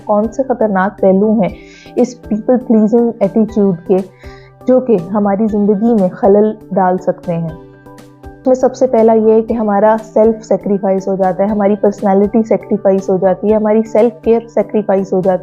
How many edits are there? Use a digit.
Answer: 0